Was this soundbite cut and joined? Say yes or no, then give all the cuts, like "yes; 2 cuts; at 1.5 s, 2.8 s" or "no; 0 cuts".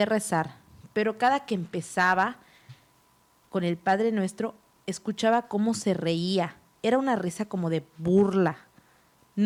no; 0 cuts